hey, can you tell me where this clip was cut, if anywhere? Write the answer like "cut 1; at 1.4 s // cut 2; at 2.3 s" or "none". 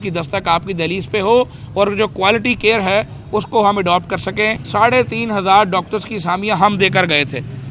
cut 1; at 4.5 s